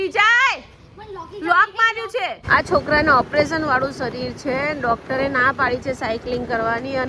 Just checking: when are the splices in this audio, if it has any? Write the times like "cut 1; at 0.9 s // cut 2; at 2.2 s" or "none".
cut 1; at 2.4 s